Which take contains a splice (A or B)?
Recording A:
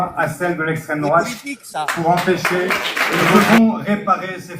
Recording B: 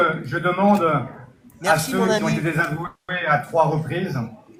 A